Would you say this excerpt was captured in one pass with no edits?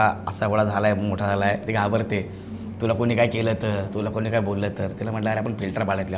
yes; 0 cuts

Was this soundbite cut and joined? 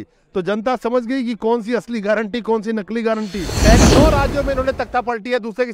yes; 1 cut; at 3.8 s

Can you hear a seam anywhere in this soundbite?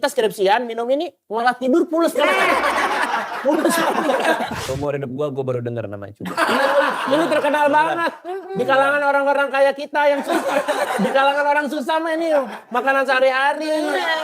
yes; 1 cut; at 4.7 s

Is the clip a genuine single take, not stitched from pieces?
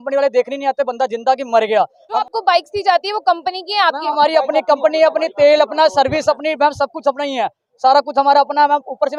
no; 1 cut; at 2.2 s

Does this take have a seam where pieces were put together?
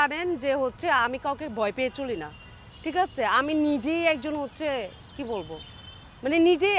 no; 0 cuts

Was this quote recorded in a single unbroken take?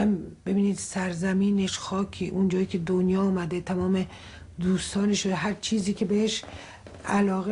yes; 0 cuts

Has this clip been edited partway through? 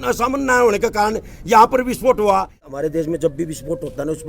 yes; 1 cut; at 2.6 s

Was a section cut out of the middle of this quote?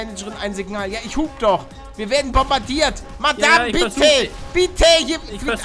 yes; 1 cut; at 4.4 s

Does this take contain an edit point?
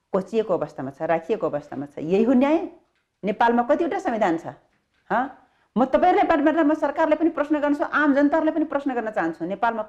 no; 0 cuts

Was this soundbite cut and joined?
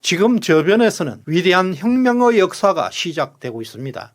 yes; 1 cut; at 1.1 s

